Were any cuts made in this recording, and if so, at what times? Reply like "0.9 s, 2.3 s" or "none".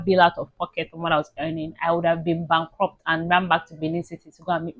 none